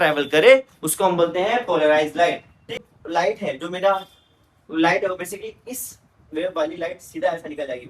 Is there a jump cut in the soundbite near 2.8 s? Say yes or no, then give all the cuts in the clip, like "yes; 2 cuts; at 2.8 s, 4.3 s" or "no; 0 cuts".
yes; 1 cut; at 2.8 s